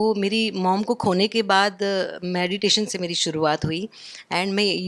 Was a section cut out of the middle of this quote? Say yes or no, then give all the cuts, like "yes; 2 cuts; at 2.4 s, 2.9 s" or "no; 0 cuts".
no; 0 cuts